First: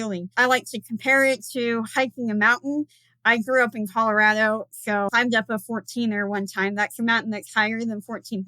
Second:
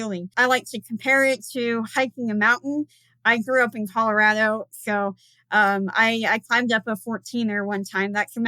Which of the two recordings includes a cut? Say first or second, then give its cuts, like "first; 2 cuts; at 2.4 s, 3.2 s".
first; 1 cut; at 5.1 s